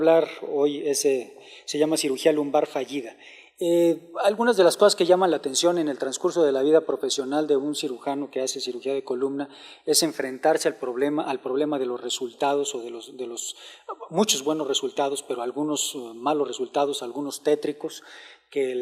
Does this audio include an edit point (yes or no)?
yes